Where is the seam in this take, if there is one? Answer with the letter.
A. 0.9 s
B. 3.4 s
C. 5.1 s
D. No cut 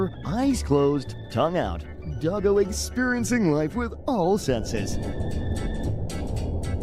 D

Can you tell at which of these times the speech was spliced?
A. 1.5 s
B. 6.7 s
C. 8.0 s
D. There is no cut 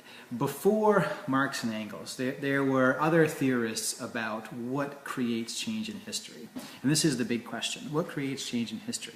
B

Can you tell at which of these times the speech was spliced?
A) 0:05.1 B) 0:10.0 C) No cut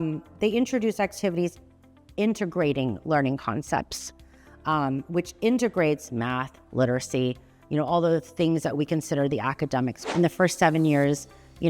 B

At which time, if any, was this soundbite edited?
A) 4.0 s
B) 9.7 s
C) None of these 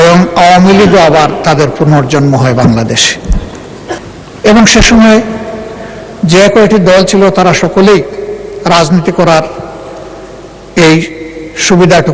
A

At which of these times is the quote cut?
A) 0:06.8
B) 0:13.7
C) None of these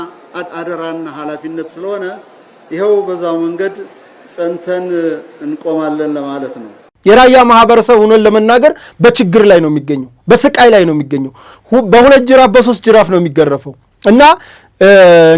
A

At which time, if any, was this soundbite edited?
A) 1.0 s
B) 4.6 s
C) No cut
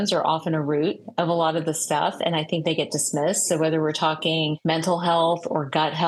B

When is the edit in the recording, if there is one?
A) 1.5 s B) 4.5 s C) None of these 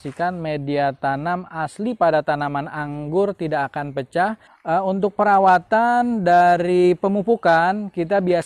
B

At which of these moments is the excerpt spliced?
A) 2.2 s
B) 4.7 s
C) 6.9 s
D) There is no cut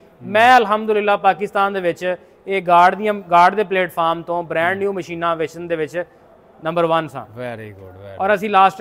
D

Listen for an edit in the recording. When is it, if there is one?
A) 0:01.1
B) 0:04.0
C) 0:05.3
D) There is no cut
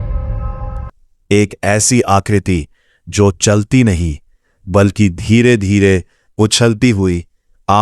A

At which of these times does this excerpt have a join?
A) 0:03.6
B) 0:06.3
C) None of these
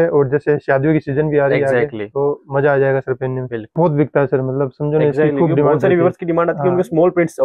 A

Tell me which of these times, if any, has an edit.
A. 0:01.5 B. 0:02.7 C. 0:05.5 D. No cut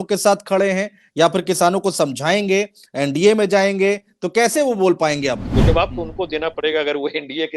C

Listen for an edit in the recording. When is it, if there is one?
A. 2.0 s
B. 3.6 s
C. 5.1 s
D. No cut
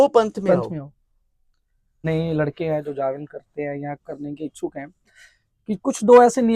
A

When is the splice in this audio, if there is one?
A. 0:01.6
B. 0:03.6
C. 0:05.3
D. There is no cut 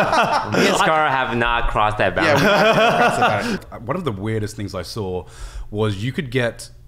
B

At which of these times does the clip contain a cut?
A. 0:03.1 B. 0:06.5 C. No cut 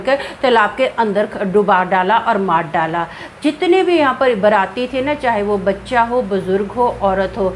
C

